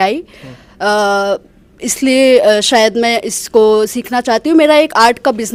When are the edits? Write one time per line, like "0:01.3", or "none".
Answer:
none